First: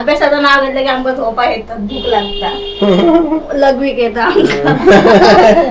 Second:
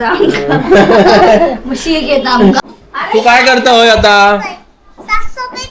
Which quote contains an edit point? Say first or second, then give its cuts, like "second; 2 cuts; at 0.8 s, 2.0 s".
second; 1 cut; at 2.6 s